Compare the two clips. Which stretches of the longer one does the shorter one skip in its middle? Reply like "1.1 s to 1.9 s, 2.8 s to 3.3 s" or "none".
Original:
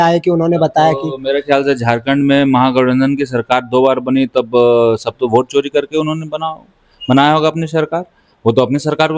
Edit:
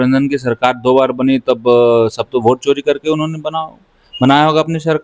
none